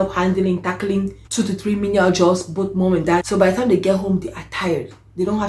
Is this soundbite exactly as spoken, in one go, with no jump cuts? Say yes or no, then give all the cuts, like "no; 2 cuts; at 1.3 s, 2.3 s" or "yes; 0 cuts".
yes; 0 cuts